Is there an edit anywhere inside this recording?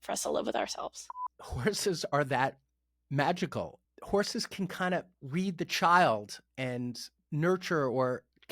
yes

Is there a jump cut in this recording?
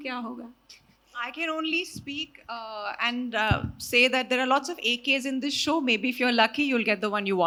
no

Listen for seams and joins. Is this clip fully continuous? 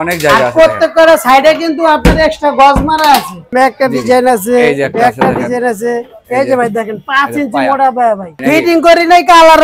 no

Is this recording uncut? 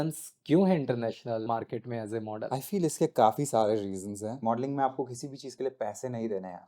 no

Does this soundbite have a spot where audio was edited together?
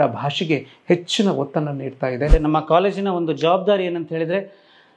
yes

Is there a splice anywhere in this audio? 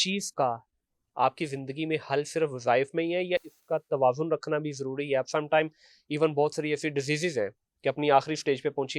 no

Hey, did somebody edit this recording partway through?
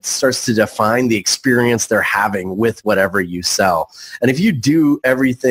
no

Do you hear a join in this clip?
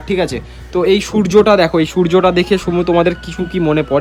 no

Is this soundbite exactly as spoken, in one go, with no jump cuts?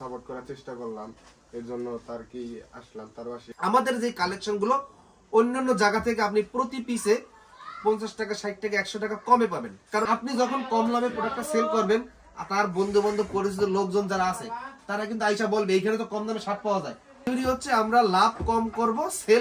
no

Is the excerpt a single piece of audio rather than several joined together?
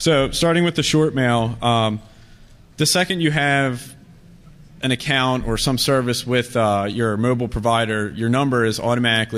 yes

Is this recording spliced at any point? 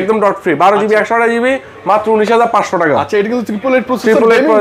no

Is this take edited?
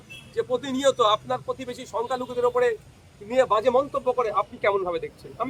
no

